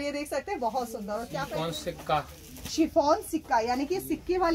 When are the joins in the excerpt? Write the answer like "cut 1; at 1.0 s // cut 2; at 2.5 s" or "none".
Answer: cut 1; at 1.4 s